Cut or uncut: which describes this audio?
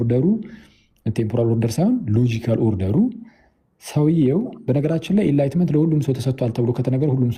uncut